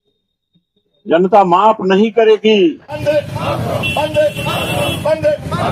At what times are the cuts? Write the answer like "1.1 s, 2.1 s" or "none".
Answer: none